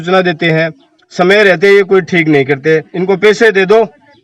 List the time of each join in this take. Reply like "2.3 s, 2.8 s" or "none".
2.9 s